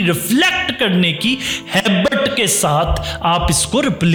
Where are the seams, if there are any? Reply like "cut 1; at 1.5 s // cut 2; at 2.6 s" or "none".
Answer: none